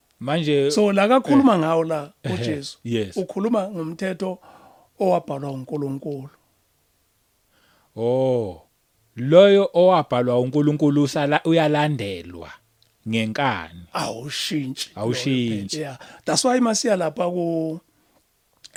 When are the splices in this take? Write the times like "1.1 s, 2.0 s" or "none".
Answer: none

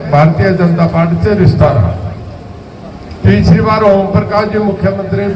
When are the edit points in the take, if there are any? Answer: none

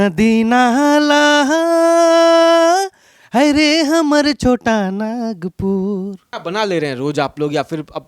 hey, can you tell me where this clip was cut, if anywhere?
6.3 s

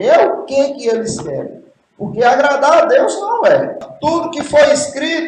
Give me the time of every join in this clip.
3.9 s

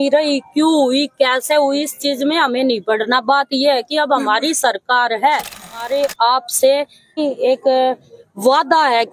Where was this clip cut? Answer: 5.8 s, 7.2 s

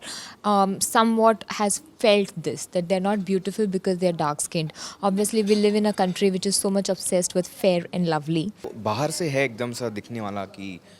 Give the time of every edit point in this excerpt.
8.7 s

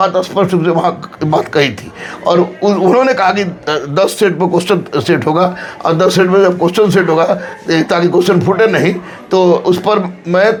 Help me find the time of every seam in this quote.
none

